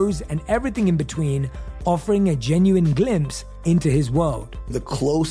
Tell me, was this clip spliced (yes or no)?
no